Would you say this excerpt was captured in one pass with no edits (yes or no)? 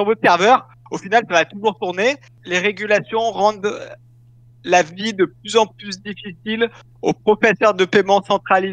no